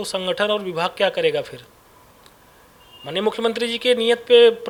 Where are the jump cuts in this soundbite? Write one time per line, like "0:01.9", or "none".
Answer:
none